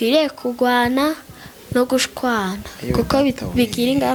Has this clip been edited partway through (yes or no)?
no